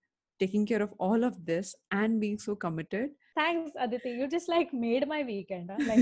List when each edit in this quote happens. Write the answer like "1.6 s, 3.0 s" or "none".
3.2 s